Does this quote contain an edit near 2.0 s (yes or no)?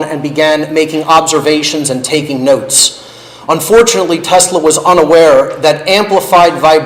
yes